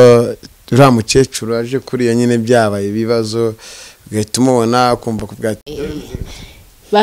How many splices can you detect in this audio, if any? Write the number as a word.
zero